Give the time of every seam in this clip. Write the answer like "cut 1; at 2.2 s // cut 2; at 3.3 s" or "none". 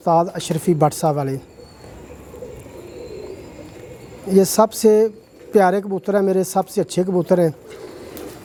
none